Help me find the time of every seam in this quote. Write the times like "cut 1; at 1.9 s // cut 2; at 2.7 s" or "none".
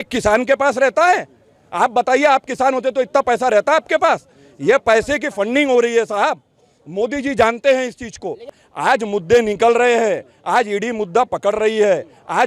cut 1; at 8.5 s